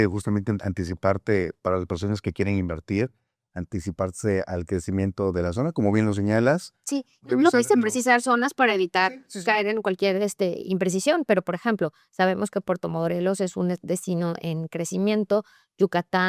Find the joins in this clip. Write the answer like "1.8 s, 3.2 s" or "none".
none